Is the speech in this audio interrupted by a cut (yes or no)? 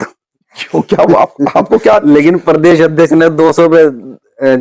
no